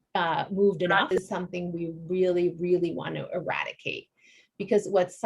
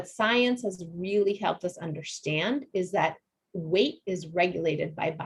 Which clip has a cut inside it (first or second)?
first